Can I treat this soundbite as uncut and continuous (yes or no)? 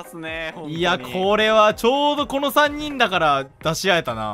yes